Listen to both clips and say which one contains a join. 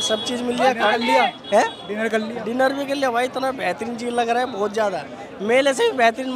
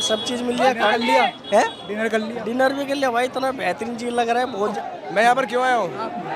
second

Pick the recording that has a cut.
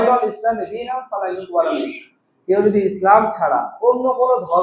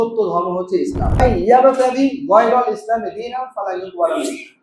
second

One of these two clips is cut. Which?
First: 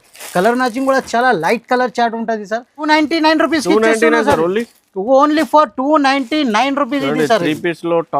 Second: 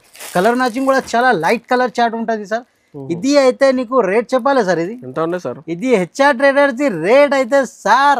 first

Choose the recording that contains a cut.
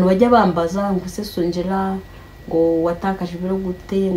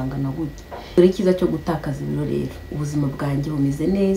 second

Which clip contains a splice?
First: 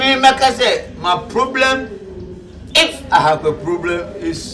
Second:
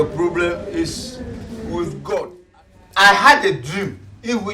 second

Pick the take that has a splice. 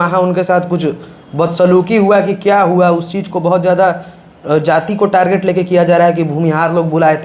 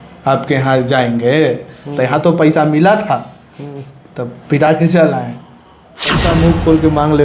second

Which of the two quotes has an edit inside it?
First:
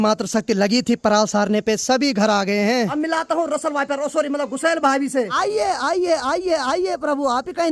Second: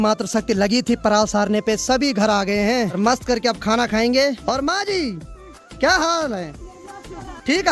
first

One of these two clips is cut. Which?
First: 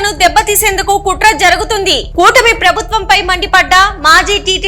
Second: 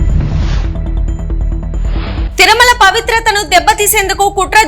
second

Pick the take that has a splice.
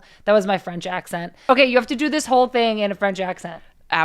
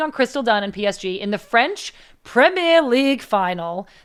first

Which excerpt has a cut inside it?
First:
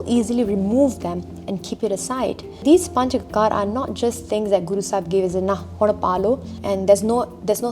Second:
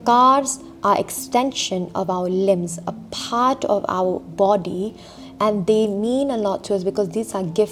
first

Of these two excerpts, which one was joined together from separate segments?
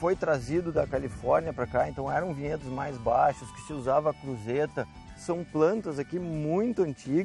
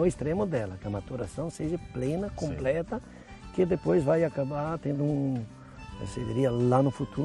first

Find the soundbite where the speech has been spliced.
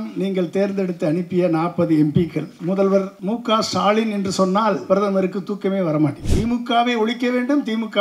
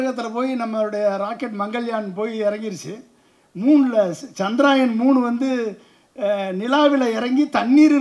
first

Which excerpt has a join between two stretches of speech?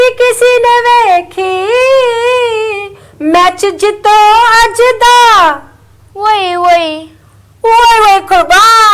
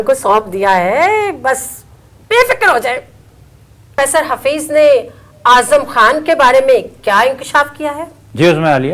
second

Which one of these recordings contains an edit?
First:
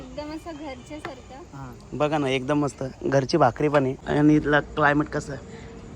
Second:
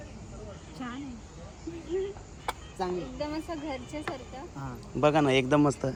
first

